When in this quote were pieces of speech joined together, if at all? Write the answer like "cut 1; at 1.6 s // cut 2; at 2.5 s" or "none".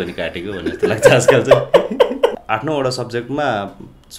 cut 1; at 2.4 s